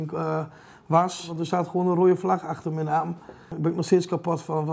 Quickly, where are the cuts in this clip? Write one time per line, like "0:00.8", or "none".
0:01.4
0:03.5